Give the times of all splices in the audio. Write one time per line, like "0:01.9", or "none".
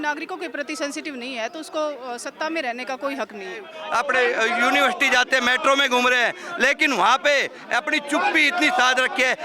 0:03.8